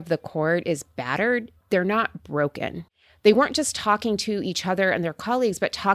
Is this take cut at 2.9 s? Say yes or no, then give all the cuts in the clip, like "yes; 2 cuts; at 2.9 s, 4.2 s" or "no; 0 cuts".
yes; 1 cut; at 2.9 s